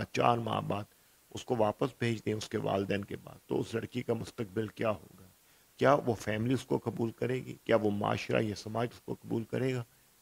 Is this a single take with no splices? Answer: yes; 0 cuts

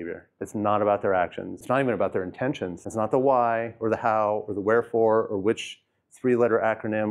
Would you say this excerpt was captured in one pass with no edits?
no; 2 cuts; at 1.5 s, 2.8 s

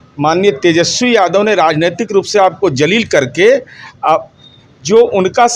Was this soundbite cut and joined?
no; 0 cuts

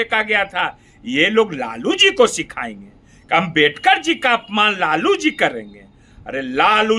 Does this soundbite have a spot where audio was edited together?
no; 0 cuts

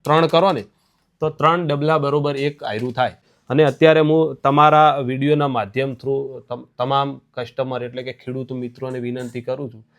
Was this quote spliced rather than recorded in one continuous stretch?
yes; 1 cut; at 3.3 s

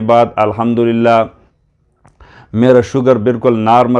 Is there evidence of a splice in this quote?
no; 0 cuts

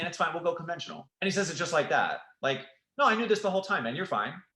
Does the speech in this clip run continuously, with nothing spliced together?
yes; 0 cuts

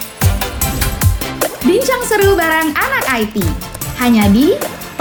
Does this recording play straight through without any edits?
yes; 0 cuts

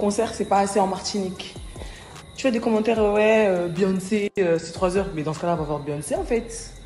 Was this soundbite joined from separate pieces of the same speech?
no; 0 cuts

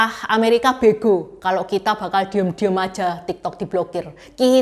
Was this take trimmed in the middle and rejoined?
no; 0 cuts

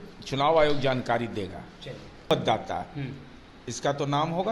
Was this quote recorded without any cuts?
no; 1 cut; at 2.2 s

